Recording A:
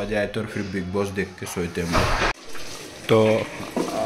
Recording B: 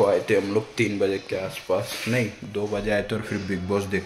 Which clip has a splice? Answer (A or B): A